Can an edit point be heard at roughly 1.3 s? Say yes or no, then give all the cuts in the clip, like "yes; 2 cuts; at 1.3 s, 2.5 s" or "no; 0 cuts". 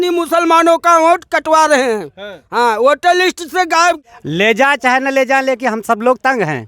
no; 1 cut; at 4.1 s